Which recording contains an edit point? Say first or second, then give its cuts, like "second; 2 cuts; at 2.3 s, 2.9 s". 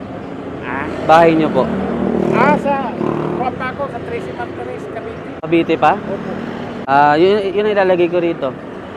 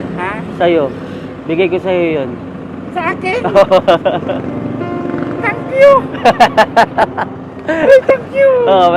first; 2 cuts; at 5.4 s, 6.7 s